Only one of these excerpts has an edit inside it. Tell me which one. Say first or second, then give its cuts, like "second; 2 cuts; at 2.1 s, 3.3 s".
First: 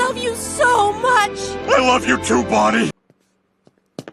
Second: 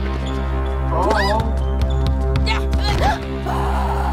first; 1 cut; at 3.1 s